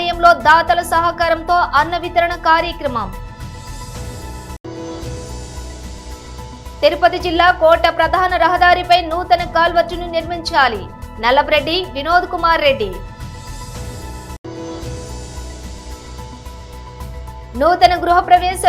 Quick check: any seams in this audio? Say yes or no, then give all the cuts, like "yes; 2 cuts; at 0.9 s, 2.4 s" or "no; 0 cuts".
no; 0 cuts